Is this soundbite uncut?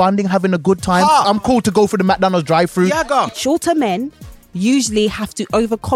no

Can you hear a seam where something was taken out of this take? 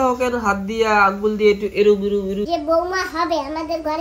yes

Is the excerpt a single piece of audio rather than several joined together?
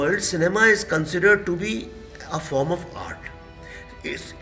yes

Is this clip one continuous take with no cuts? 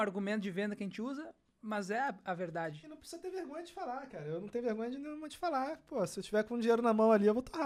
yes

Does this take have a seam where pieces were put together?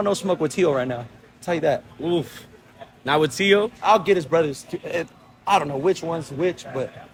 no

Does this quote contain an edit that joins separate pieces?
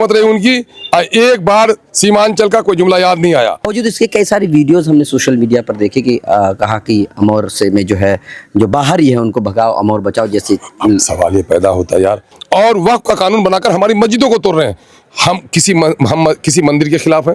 yes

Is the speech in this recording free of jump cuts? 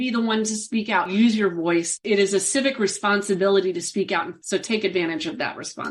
no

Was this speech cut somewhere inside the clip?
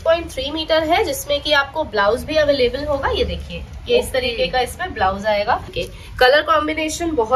yes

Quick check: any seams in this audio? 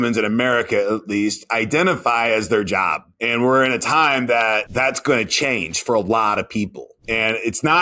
no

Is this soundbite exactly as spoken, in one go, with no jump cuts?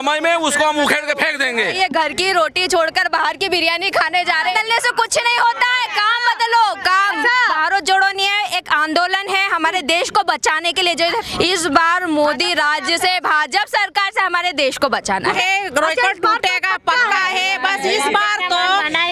no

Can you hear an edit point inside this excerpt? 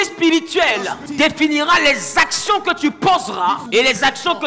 yes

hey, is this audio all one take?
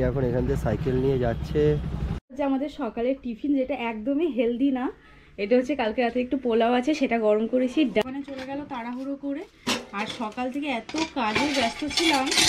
no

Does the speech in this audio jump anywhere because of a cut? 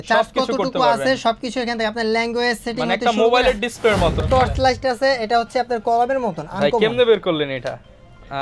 yes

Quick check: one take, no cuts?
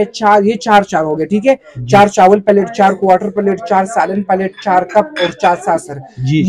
yes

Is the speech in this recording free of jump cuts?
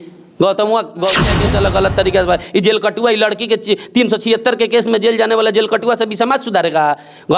no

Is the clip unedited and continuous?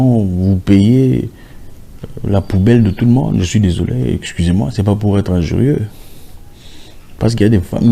yes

